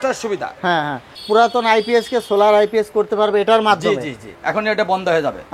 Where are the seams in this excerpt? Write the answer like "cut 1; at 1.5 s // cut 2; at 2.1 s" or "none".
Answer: cut 1; at 1.1 s // cut 2; at 4.3 s